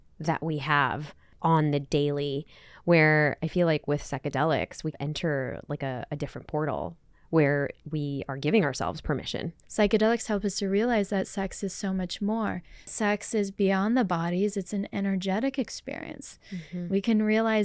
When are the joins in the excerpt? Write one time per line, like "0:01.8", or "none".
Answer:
0:01.2
0:04.9
0:09.6
0:12.9